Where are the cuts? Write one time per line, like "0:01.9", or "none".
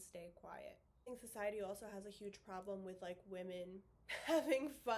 0:01.1